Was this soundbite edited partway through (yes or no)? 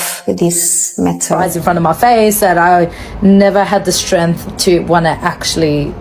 yes